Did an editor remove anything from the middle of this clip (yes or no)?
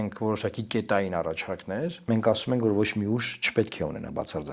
yes